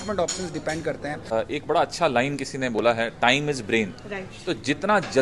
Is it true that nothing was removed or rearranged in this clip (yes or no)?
no